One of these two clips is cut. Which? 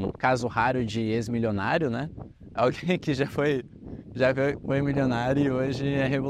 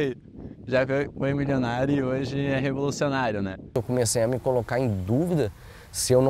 second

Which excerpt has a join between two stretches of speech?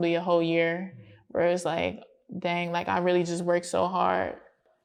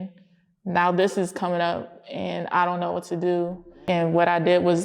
second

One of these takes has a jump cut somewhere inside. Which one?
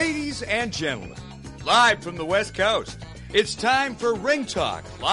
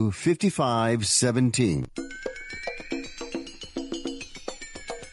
second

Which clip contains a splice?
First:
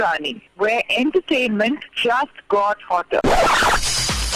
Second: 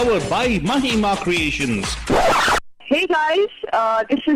second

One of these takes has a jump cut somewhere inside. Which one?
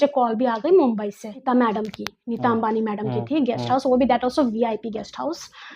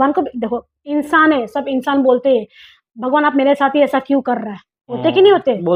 first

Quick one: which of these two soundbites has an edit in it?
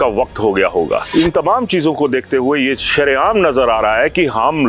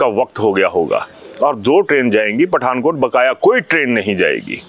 first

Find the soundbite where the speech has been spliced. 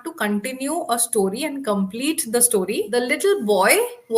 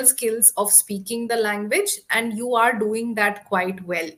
first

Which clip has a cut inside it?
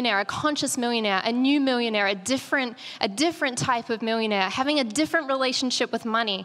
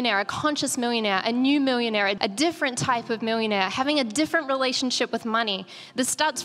second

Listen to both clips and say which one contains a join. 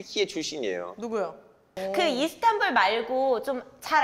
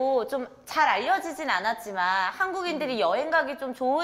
first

